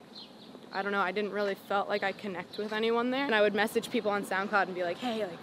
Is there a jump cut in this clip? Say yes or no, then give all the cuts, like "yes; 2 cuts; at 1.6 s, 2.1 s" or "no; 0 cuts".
yes; 1 cut; at 3.3 s